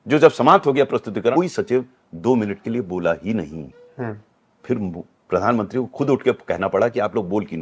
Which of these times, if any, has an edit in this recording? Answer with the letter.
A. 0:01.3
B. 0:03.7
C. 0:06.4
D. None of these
A